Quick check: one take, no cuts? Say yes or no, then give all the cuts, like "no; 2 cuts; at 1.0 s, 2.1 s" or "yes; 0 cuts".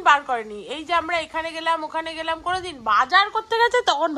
yes; 0 cuts